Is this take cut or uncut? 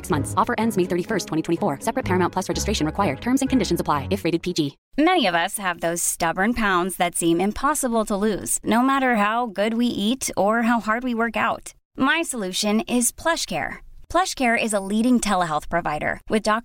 cut